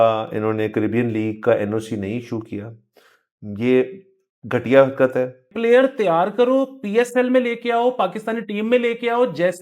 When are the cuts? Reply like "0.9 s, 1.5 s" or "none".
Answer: 5.4 s